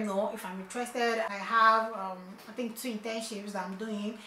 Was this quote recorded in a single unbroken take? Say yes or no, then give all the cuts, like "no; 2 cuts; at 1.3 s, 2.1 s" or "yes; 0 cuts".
no; 1 cut; at 1.3 s